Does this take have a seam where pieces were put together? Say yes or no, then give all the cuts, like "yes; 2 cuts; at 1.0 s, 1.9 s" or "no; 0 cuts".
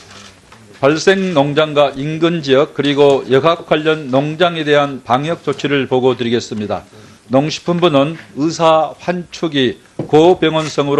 no; 0 cuts